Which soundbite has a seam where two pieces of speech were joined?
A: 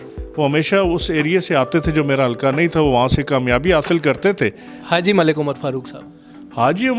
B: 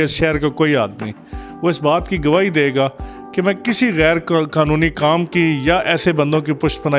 A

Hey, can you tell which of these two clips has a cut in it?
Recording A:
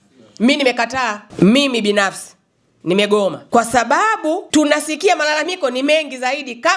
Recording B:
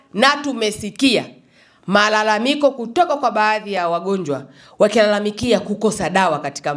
A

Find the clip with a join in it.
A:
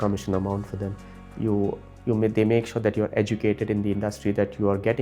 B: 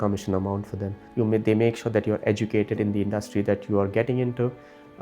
B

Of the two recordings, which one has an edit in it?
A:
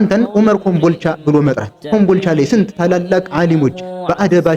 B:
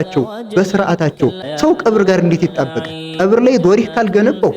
B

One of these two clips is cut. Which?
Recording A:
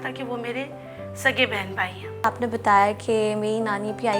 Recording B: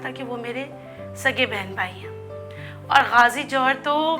A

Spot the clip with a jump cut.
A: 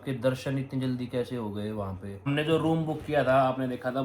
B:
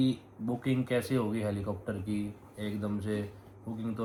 A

